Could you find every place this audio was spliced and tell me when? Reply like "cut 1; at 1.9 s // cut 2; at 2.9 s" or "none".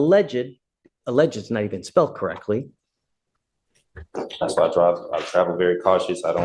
cut 1; at 3.2 s